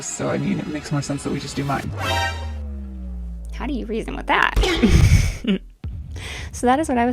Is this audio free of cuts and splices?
yes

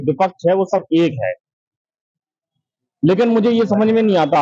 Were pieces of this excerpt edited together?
no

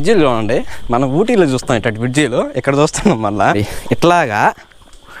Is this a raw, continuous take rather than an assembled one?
no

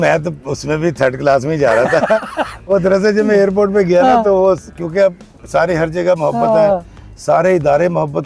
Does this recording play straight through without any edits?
yes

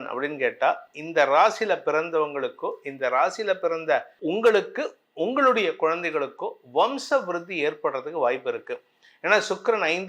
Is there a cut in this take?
no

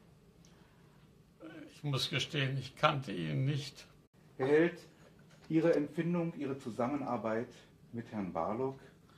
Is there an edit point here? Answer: no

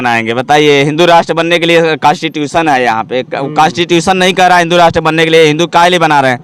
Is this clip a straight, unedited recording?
yes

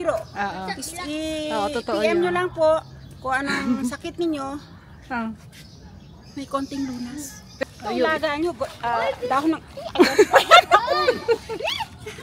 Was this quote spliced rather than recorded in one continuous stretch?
yes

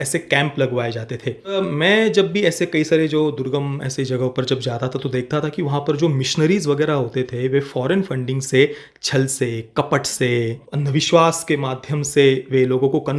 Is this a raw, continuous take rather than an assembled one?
no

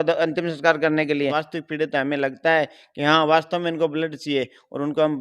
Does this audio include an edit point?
yes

